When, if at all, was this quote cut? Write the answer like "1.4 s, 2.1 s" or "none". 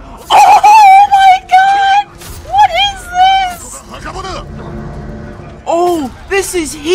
none